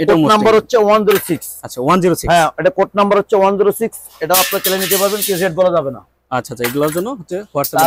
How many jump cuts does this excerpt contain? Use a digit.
0